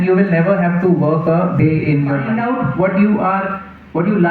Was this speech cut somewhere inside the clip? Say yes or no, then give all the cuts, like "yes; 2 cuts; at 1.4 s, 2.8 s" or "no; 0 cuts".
yes; 1 cut; at 2.2 s